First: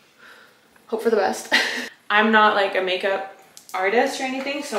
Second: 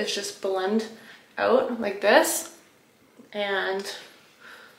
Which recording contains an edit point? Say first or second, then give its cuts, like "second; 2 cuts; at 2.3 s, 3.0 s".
first; 1 cut; at 2.0 s